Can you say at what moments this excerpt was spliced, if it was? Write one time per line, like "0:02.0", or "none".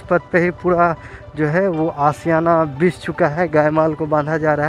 none